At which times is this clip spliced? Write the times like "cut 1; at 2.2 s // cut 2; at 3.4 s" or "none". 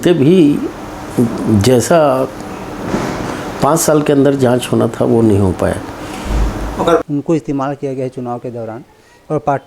cut 1; at 7.0 s